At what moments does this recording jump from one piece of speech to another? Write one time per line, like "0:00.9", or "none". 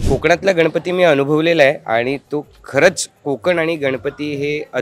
none